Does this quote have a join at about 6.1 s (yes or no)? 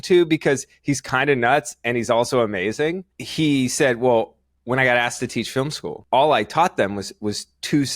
no